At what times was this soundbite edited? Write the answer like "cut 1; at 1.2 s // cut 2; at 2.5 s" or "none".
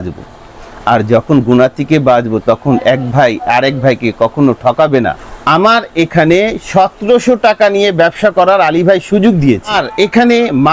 cut 1; at 5.3 s // cut 2; at 9.8 s